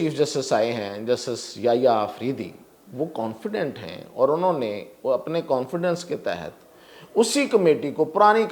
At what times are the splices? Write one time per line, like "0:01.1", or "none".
none